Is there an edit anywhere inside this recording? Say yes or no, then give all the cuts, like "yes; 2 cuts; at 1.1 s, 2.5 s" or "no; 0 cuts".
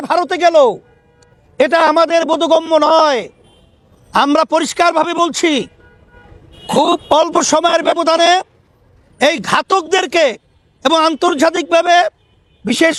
no; 0 cuts